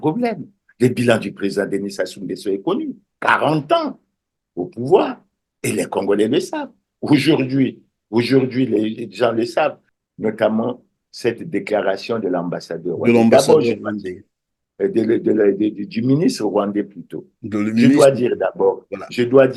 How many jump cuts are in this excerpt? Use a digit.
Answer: 1